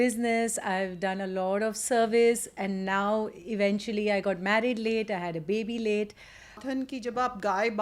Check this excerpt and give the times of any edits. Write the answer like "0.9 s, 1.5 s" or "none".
6.6 s